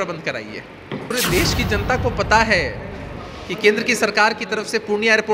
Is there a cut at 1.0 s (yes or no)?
yes